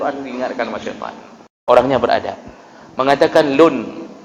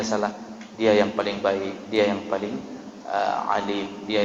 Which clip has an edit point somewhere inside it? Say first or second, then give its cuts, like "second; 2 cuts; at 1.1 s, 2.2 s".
first; 1 cut; at 1.5 s